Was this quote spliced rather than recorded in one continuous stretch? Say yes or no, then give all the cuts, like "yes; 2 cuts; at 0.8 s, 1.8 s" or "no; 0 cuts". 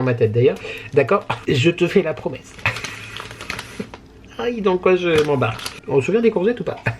yes; 2 cuts; at 1.3 s, 5.8 s